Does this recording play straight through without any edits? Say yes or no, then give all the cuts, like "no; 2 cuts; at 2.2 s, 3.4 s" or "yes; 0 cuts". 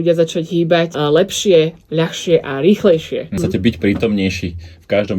no; 2 cuts; at 0.9 s, 3.3 s